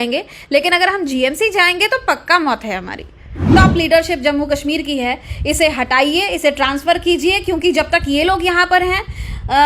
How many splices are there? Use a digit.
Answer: 1